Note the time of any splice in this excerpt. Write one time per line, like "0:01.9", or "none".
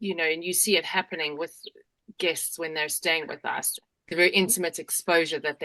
0:03.7